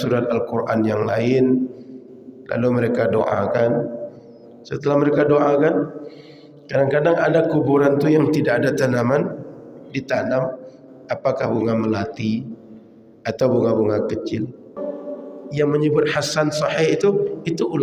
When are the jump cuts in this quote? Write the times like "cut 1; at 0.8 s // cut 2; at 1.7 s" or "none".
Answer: cut 1; at 14.8 s